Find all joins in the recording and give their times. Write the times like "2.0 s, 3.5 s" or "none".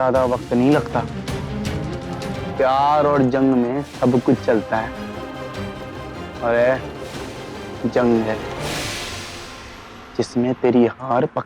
2.4 s